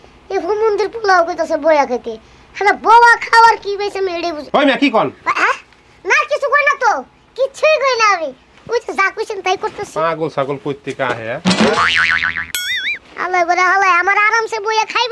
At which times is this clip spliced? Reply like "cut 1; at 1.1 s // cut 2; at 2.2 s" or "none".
none